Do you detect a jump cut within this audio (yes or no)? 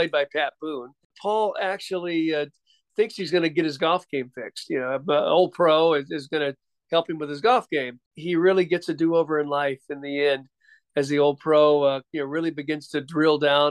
yes